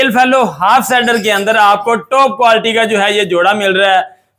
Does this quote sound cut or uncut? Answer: uncut